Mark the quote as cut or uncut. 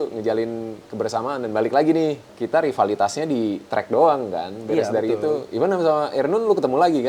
uncut